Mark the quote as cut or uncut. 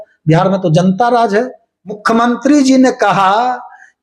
cut